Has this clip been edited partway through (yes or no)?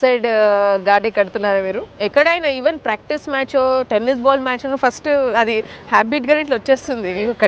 yes